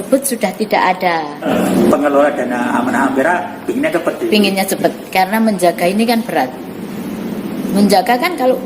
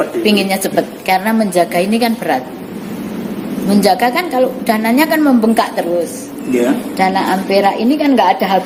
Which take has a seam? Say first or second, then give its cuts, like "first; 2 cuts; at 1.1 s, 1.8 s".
first; 1 cut; at 1.4 s